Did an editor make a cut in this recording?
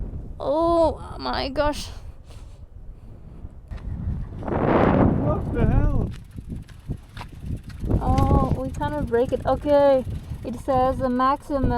yes; 1 cut; at 3.8 s

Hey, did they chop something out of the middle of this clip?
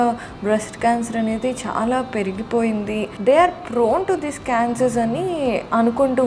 yes; 1 cut; at 3.1 s

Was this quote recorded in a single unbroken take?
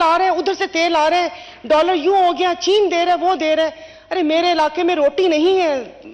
yes; 0 cuts

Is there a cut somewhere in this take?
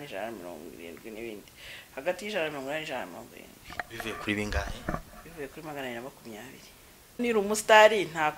yes; 1 cut; at 7.2 s

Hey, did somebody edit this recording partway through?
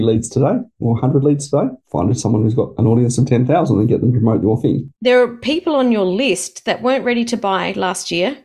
yes; 2 cuts; at 1.8 s, 4.9 s

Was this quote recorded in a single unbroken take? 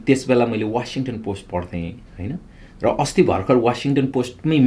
yes; 0 cuts

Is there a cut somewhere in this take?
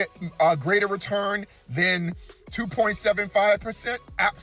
no; 0 cuts

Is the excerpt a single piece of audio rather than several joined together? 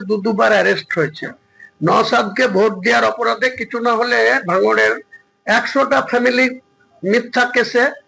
yes; 0 cuts

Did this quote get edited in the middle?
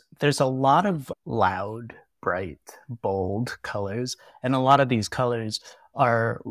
yes; 1 cut; at 1.1 s

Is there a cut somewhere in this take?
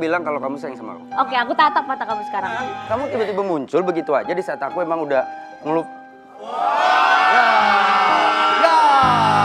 no; 0 cuts

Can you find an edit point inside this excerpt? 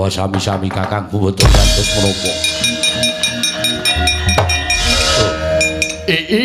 yes; 1 cut; at 4.8 s

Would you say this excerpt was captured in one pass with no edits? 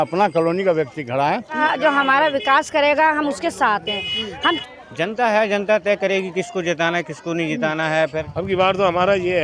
no; 3 cuts; at 1.6 s, 4.6 s, 8.2 s

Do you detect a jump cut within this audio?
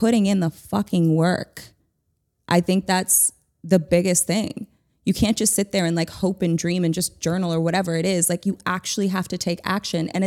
no; 0 cuts

